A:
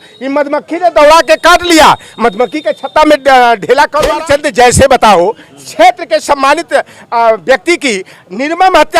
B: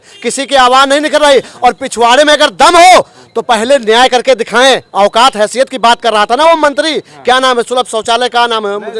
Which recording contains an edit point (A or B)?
A